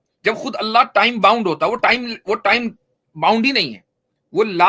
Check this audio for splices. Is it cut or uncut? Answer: uncut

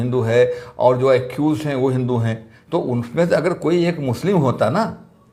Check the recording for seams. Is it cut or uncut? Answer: uncut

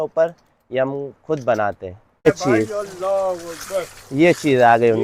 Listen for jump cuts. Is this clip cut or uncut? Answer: cut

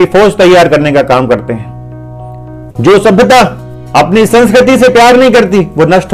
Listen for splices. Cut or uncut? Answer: uncut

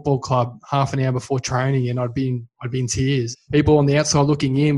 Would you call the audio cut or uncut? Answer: cut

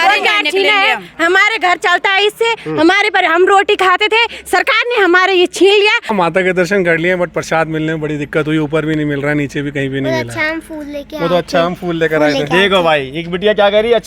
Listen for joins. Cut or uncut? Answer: cut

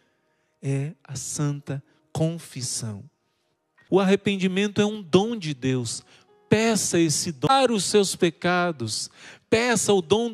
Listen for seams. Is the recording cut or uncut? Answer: cut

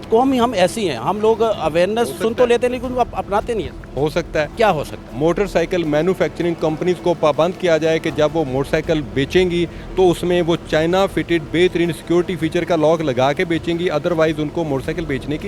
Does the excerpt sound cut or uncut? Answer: uncut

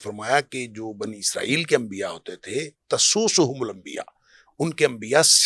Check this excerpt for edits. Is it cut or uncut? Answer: uncut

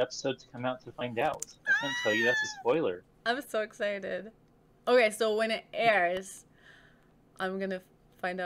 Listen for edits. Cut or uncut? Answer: uncut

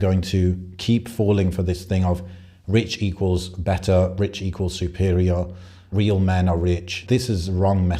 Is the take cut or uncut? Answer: cut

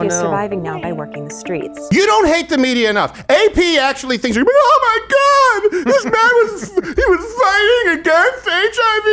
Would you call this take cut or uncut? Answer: cut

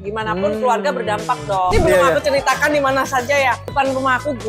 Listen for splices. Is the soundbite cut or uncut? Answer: cut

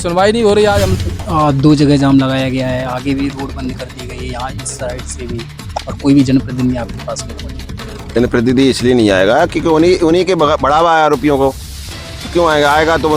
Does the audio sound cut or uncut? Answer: cut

